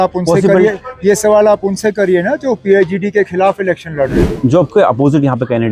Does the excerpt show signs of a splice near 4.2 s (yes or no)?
yes